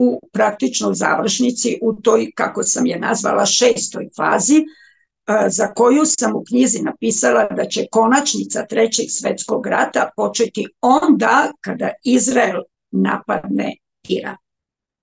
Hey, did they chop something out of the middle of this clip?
no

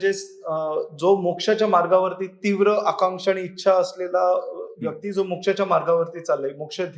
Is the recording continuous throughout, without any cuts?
yes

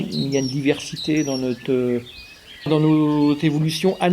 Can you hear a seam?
yes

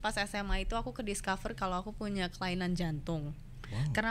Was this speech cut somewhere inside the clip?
no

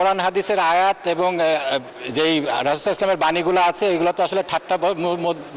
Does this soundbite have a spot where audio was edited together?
no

